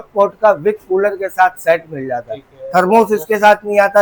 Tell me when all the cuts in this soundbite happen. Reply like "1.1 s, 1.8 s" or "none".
none